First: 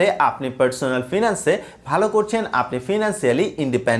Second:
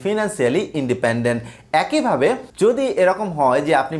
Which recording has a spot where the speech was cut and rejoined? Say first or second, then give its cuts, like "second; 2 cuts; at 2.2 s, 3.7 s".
second; 1 cut; at 2.5 s